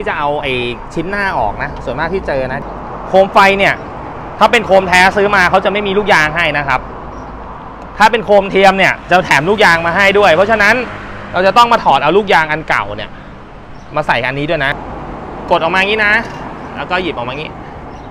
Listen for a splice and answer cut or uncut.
cut